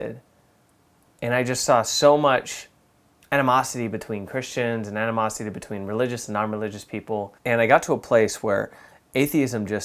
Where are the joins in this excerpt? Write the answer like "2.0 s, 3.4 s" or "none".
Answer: 7.3 s